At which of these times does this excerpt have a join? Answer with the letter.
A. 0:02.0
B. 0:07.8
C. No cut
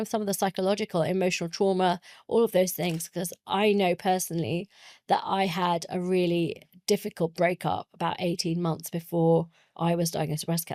C